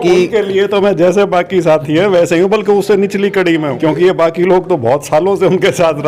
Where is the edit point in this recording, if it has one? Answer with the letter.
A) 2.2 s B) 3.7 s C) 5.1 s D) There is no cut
B